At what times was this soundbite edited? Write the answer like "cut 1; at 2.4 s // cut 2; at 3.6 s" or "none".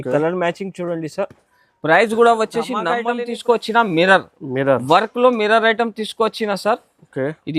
cut 1; at 2.9 s

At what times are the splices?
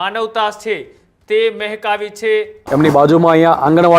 cut 1; at 2.6 s

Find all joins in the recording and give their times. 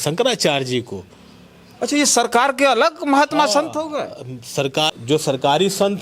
cut 1; at 4.9 s

